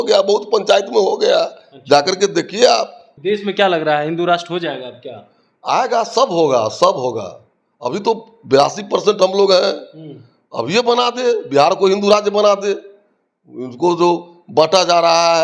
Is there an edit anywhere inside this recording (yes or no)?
yes